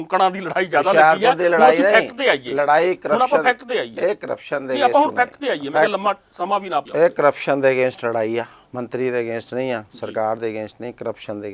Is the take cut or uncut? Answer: cut